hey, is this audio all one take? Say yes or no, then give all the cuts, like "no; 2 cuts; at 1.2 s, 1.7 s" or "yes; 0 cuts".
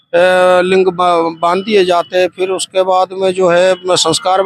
yes; 0 cuts